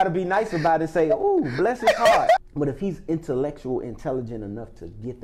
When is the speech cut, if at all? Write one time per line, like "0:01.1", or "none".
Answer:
0:02.4